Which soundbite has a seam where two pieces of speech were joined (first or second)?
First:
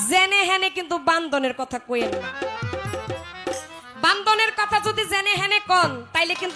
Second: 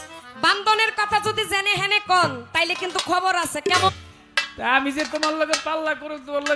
second